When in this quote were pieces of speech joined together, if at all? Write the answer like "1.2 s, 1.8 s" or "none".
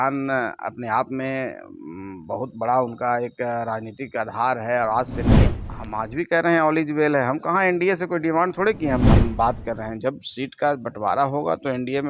5.5 s, 9.0 s